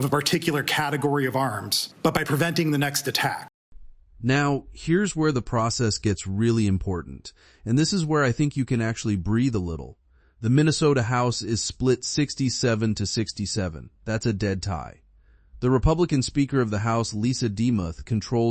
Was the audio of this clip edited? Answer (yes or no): no